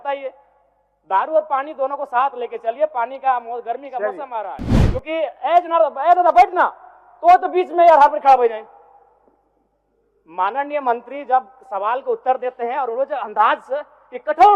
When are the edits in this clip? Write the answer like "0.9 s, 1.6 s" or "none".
4.7 s

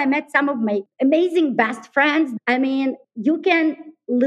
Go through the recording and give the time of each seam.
0.9 s, 2.3 s, 3.1 s

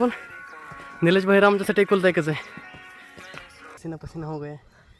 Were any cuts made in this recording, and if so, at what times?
3.8 s

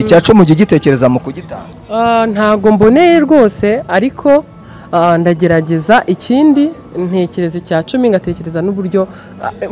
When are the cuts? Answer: none

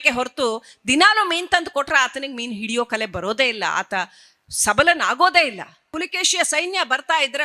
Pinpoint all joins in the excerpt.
5.9 s

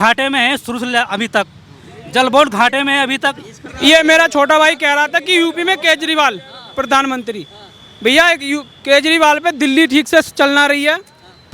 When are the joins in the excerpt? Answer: 3.6 s

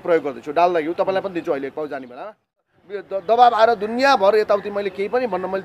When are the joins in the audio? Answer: 2.7 s

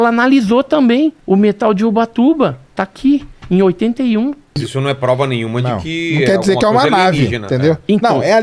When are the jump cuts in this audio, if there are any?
1.2 s, 4.6 s

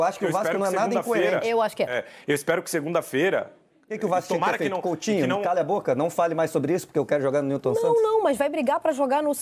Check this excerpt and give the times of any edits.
none

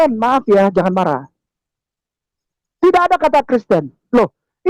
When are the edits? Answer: none

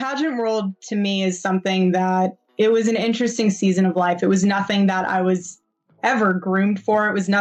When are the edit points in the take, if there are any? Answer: none

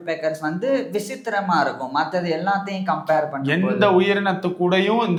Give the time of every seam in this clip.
none

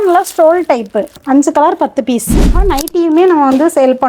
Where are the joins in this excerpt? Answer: 1.2 s, 2.6 s

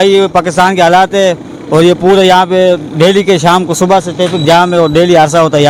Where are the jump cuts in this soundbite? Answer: none

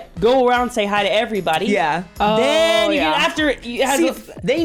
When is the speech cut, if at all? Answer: none

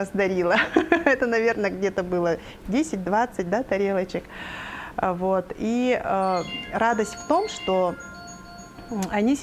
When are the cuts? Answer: none

